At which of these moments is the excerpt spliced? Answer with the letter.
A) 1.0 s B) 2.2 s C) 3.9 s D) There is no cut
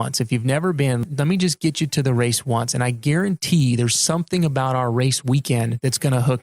A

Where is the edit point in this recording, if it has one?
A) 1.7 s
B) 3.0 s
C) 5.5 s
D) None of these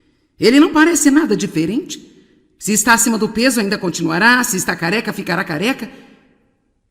A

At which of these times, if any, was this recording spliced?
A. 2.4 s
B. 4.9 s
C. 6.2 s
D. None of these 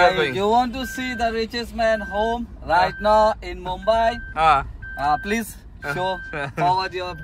D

